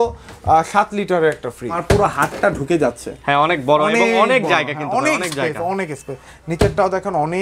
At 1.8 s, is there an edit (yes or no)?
yes